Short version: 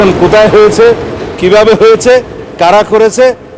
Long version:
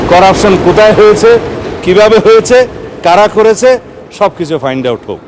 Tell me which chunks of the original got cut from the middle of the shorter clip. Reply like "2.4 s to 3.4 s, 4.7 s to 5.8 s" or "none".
none